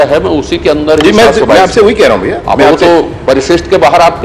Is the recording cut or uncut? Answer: uncut